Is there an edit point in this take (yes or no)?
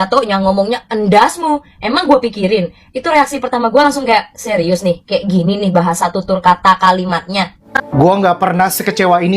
yes